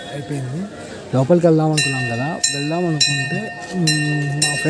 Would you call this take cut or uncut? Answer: uncut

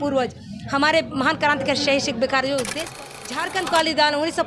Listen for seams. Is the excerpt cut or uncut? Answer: cut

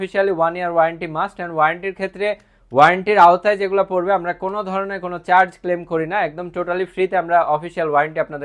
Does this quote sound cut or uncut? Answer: uncut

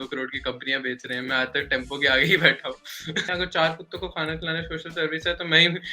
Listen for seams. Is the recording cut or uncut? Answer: cut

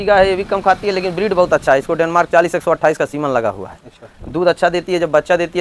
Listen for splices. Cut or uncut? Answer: uncut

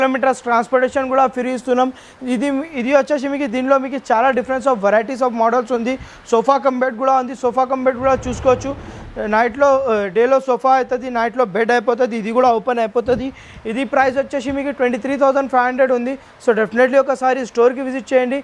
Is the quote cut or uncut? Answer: uncut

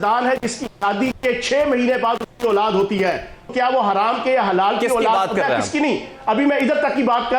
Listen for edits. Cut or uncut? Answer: cut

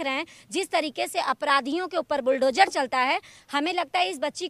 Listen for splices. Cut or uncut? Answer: uncut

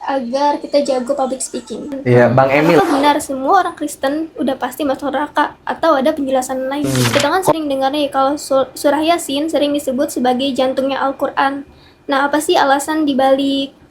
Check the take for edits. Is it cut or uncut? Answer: cut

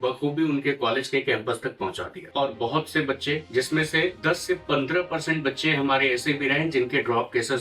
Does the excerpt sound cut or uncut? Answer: uncut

